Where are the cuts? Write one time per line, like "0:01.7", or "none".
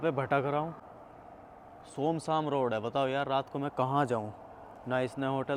none

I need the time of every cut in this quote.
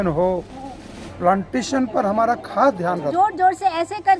0:03.1

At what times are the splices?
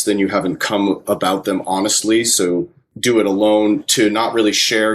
0:02.9

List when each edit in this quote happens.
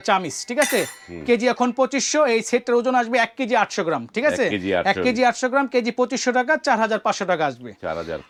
none

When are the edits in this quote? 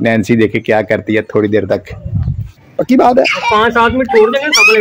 0:02.6

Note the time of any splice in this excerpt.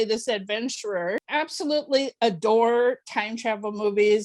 0:01.2

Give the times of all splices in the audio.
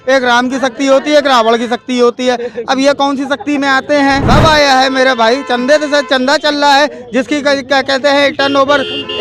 0:04.2

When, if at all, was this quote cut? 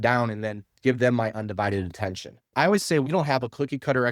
0:02.5

